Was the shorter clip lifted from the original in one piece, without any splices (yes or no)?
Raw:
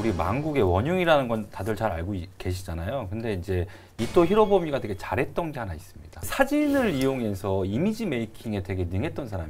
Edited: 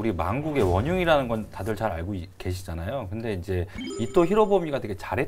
yes